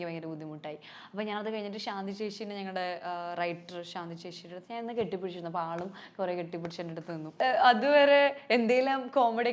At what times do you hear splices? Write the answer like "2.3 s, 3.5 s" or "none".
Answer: 7.4 s